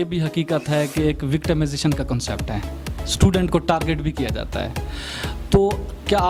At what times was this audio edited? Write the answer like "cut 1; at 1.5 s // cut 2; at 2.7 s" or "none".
none